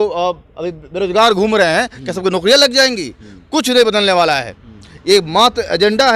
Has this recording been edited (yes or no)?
no